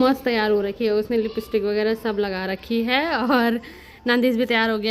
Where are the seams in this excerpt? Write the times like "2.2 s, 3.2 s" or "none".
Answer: none